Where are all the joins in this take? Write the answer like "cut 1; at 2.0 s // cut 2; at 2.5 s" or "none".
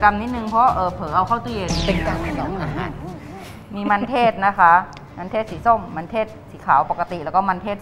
none